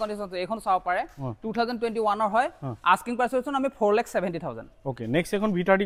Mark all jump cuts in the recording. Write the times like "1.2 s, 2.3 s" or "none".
none

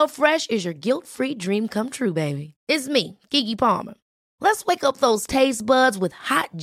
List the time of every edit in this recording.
none

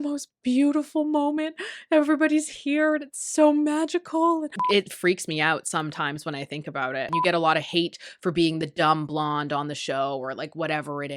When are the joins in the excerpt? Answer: 4.6 s, 7.1 s

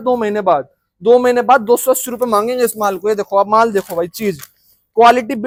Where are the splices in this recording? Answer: none

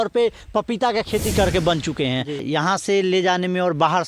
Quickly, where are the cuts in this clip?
2.4 s

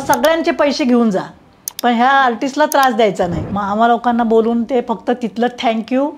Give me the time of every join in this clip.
3.4 s

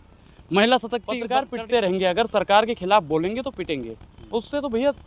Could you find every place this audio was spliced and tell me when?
1.2 s

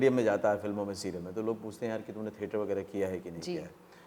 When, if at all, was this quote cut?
none

